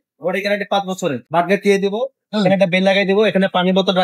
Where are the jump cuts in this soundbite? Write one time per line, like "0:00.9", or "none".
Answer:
0:01.2